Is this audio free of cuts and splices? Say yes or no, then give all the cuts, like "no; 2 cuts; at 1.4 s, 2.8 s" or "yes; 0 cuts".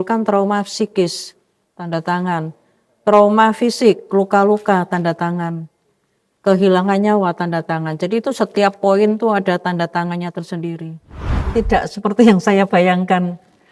no; 1 cut; at 11.5 s